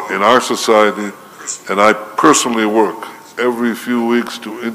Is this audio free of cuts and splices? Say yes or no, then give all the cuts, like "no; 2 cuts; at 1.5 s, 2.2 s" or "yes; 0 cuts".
no; 1 cut; at 3.3 s